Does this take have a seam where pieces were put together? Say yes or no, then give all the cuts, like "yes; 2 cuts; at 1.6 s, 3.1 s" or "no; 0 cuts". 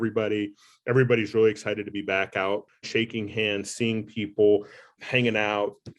yes; 2 cuts; at 2.8 s, 4.9 s